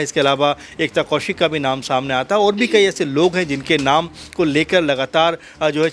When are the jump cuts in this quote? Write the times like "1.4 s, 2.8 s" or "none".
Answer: none